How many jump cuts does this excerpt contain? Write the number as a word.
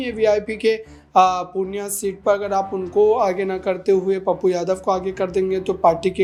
zero